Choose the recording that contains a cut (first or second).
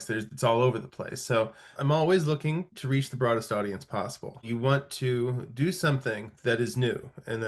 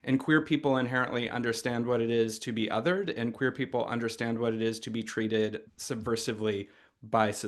first